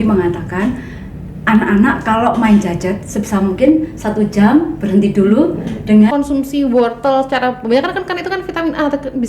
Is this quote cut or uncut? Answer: cut